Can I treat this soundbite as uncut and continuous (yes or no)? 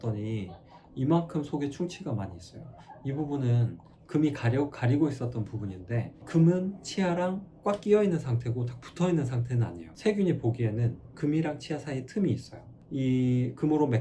yes